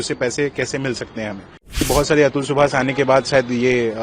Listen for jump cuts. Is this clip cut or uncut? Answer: cut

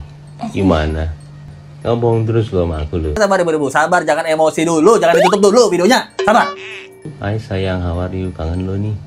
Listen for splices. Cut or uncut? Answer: cut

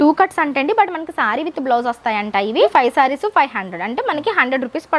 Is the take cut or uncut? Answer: cut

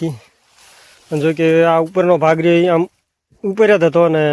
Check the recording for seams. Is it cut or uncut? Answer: uncut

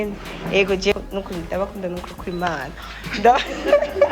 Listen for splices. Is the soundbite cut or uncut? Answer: cut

